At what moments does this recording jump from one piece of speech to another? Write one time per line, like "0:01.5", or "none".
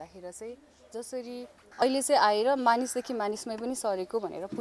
0:01.8